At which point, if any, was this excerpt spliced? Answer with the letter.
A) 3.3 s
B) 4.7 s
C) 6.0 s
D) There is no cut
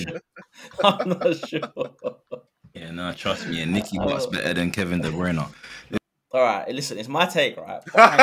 C